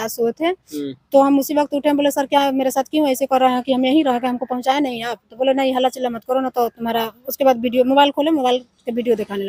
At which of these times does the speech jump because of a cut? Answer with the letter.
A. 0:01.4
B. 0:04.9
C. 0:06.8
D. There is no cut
D